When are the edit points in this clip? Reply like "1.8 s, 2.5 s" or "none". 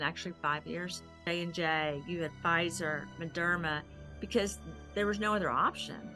1.3 s